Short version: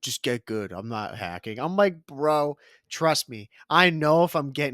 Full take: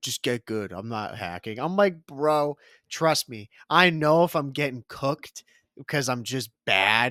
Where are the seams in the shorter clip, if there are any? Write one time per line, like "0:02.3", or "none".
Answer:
none